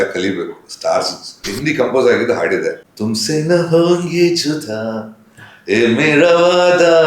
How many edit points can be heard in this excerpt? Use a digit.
2